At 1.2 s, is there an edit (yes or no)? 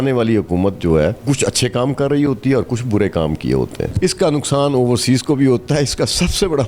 yes